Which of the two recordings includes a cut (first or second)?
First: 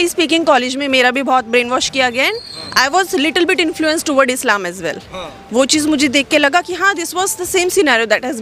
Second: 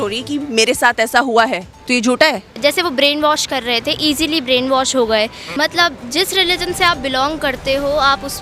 second